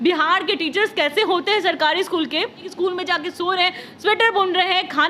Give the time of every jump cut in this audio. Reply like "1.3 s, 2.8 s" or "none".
2.7 s